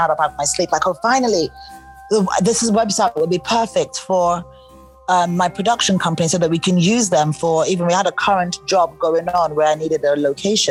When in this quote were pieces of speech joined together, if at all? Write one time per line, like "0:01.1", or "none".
none